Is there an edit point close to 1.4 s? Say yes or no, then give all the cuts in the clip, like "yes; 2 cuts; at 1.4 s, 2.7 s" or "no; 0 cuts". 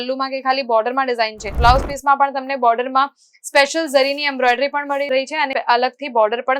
yes; 1 cut; at 1.4 s